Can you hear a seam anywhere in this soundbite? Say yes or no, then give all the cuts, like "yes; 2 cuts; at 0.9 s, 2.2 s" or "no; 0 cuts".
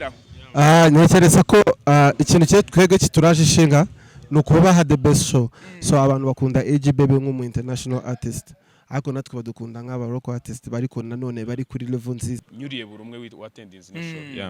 yes; 1 cut; at 12.4 s